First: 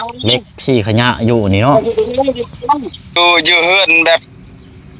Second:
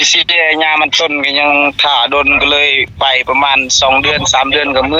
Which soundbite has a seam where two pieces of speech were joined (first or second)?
first